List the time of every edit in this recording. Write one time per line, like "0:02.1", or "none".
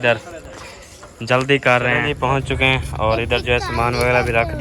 0:02.1